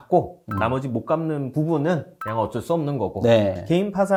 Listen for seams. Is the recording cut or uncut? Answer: uncut